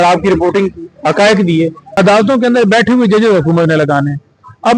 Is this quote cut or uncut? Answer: cut